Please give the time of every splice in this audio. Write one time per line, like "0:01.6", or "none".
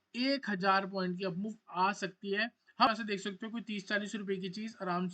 0:02.9